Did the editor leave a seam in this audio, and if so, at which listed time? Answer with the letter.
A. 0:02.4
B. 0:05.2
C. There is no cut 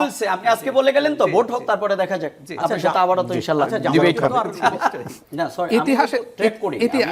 B